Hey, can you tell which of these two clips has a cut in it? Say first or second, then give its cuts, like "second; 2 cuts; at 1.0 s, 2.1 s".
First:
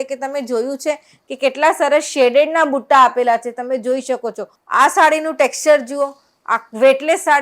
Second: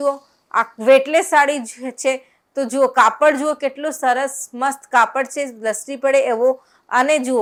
first; 1 cut; at 4.5 s